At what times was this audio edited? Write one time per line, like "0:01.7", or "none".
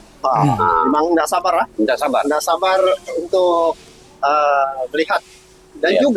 none